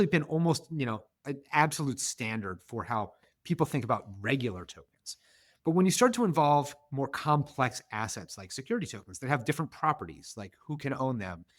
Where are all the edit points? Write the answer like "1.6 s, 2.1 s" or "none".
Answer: none